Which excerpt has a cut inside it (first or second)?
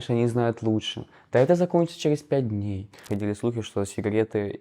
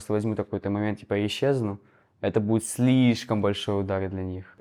first